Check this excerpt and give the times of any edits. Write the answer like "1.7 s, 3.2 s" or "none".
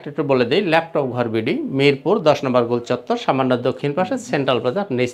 none